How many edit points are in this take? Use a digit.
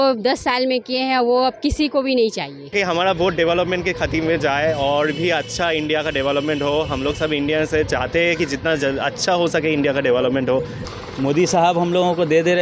2